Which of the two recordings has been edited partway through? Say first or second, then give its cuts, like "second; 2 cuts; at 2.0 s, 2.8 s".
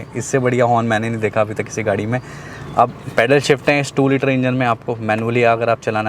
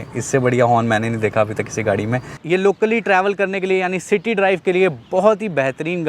second; 1 cut; at 2.3 s